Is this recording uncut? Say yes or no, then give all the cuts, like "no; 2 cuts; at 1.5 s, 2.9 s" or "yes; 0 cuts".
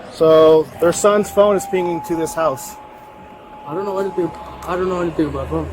yes; 0 cuts